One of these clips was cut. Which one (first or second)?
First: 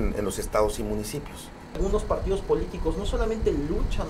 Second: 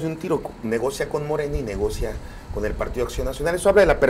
first